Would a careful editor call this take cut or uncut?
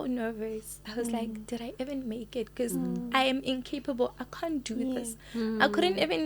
uncut